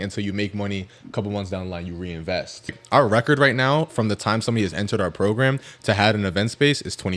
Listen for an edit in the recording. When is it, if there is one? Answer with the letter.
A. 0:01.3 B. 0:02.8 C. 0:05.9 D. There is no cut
B